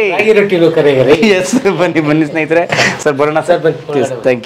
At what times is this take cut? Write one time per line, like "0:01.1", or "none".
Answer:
none